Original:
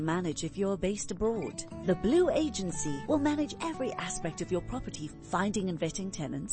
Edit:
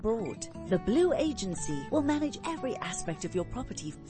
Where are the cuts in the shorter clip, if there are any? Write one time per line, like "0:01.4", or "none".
none